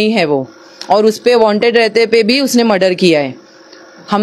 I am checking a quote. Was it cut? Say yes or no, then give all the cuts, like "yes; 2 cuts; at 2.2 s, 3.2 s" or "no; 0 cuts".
no; 0 cuts